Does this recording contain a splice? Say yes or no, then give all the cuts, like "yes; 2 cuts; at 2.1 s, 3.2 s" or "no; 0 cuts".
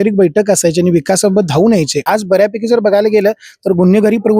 yes; 1 cut; at 2.0 s